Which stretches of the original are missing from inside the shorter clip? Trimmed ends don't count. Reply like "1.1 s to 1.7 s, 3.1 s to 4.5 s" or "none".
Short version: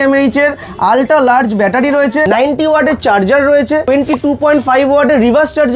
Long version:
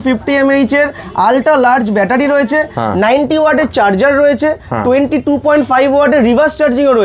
2.7 s to 3.0 s, 4.6 s to 4.9 s